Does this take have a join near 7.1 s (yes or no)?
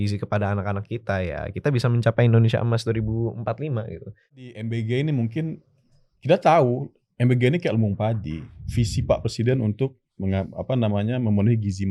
no